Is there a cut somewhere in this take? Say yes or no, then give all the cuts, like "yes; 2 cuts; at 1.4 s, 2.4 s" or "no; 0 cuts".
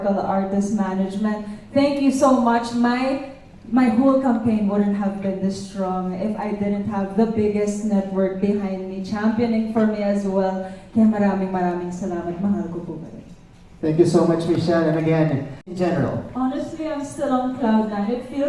yes; 1 cut; at 15.6 s